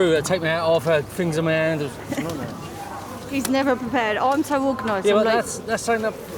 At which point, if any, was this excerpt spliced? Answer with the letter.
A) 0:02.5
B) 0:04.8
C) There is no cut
C